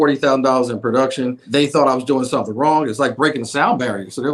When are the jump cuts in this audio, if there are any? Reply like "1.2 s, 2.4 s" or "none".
1.4 s